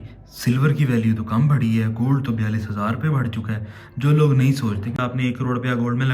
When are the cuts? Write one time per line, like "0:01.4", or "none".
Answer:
0:04.9